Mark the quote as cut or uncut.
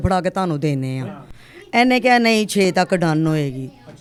uncut